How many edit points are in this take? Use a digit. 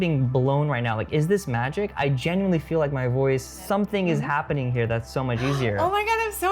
1